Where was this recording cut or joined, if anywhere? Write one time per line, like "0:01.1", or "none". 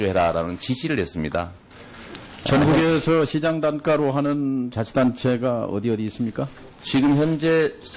0:05.1

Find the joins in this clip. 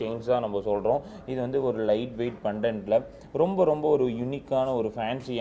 none

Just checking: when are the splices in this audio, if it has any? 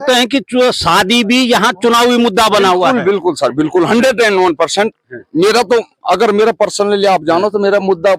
none

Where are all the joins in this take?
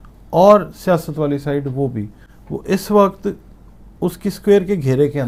none

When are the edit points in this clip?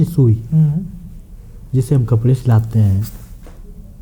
none

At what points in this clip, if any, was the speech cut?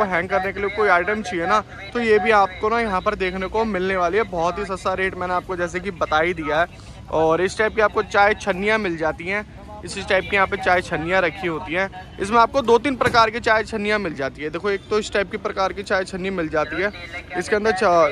none

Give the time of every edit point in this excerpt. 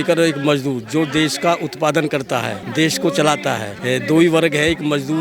0:02.6
0:03.7

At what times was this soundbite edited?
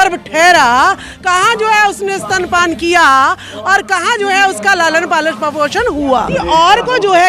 0:06.3

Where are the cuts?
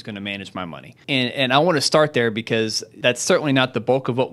0:02.8

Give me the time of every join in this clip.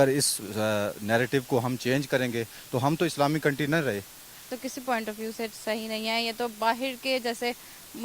0:04.5

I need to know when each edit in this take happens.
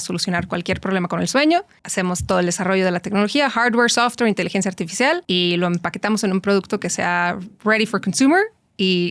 0:01.8
0:05.2

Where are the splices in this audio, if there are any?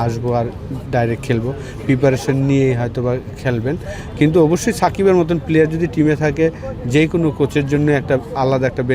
none

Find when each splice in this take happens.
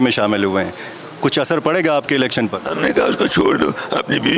0:02.6

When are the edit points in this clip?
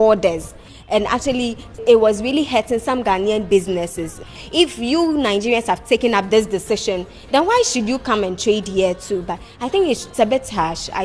0:04.4

